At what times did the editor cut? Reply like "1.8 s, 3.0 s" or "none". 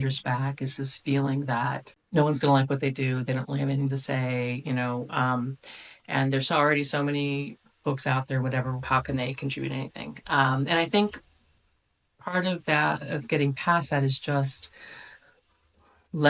1.9 s